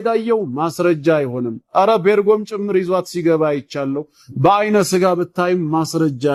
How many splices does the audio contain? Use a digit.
0